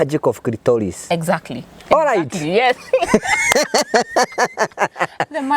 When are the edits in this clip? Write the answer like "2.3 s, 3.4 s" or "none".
none